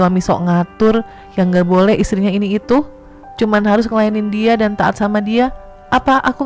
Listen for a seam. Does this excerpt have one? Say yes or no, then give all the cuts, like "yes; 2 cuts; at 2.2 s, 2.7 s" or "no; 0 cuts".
no; 0 cuts